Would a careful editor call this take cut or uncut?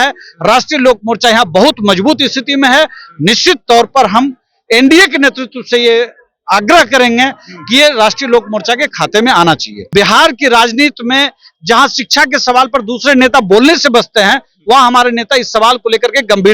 cut